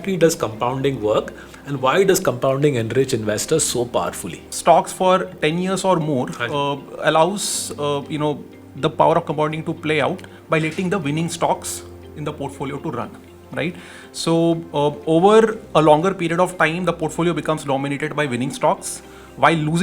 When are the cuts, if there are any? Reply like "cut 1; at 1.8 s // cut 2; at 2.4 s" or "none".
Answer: cut 1; at 4.5 s